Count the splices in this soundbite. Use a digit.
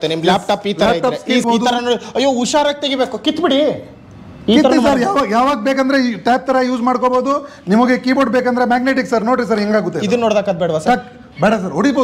1